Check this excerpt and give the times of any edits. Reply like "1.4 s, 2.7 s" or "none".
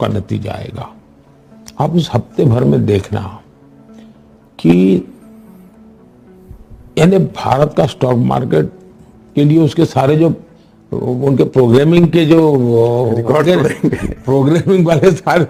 none

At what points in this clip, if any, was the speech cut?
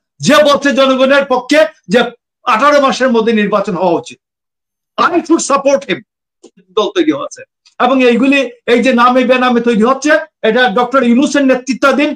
6.7 s

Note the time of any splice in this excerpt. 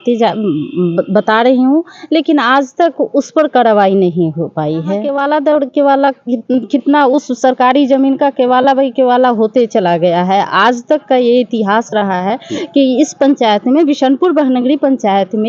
5.1 s

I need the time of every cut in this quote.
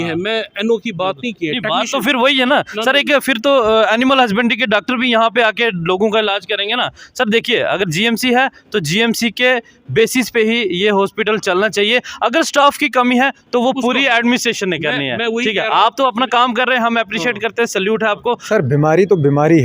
18.4 s

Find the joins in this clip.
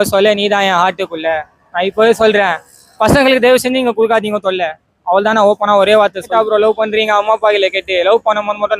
6.3 s

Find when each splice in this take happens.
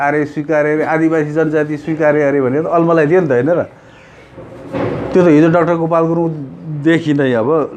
none

